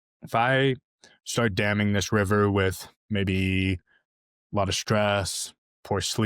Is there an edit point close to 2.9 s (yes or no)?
yes